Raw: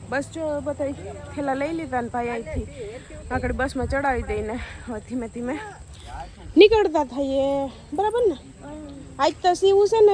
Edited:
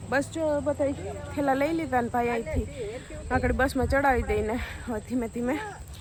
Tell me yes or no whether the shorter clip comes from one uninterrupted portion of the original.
yes